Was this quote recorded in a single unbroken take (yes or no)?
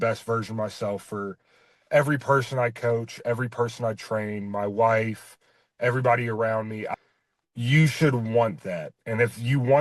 yes